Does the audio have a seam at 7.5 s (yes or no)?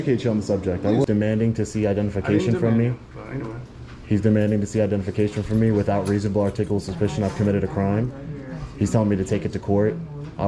no